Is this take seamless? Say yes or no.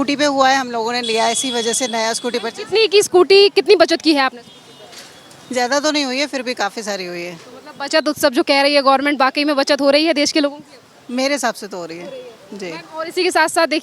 yes